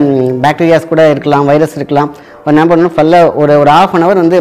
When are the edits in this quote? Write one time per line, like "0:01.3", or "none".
none